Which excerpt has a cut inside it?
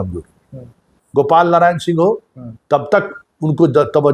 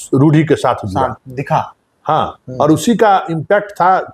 first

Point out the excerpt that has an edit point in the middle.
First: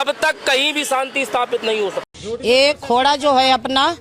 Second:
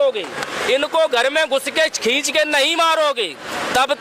first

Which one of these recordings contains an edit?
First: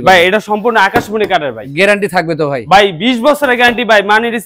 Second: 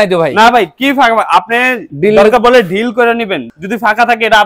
second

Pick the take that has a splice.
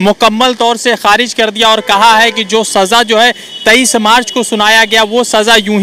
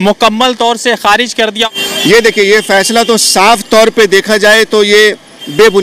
second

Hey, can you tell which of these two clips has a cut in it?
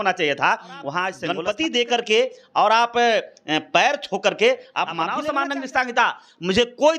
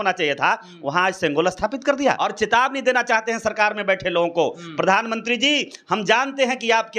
first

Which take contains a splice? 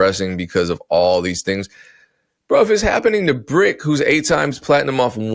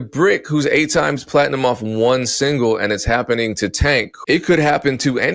second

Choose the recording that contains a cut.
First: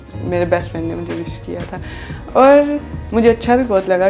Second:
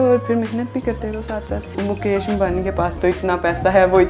second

